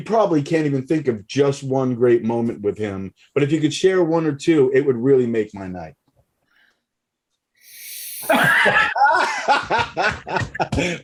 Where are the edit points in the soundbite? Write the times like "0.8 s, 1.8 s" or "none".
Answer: none